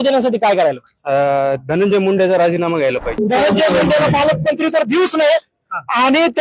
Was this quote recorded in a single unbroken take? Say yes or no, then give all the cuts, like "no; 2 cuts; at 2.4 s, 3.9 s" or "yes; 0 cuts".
no; 1 cut; at 3.2 s